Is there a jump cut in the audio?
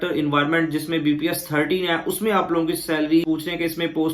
yes; 1 cut; at 3.2 s

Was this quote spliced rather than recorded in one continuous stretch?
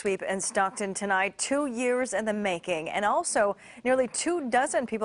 no; 0 cuts

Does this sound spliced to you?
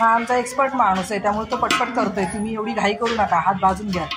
no; 0 cuts

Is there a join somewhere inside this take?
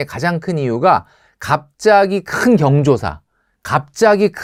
no; 0 cuts

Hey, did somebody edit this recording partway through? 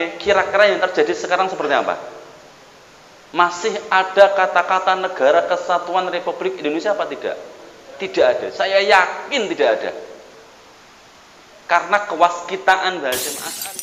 no; 0 cuts

